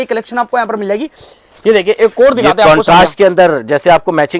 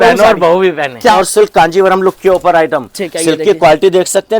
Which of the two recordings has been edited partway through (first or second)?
second